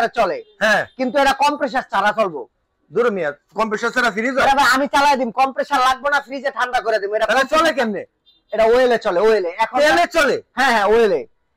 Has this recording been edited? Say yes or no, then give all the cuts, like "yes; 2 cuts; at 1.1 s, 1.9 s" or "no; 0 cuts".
no; 0 cuts